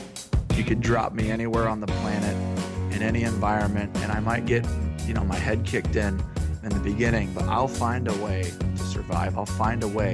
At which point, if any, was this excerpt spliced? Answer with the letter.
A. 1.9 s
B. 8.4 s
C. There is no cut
C